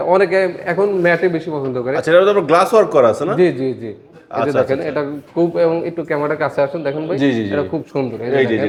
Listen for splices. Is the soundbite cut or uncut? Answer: uncut